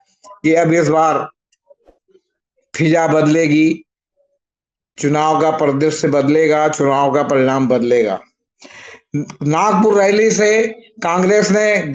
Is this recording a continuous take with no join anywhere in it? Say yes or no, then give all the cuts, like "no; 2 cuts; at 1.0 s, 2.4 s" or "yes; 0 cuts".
yes; 0 cuts